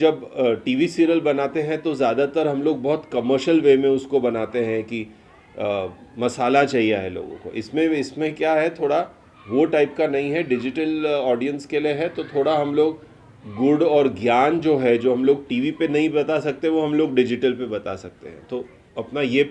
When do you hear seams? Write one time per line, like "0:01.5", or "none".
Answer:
none